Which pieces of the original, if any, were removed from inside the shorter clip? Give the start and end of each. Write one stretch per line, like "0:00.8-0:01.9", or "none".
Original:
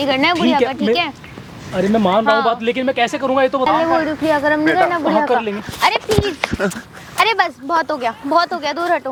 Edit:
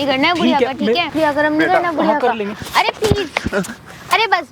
0:01.1-0:04.2